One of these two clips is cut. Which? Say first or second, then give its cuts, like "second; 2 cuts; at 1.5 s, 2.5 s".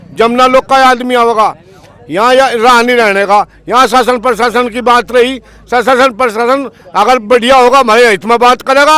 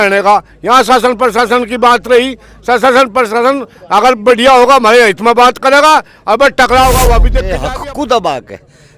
second; 1 cut; at 7.4 s